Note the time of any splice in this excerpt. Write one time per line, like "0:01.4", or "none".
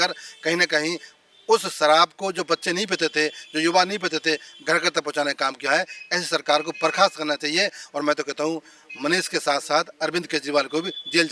none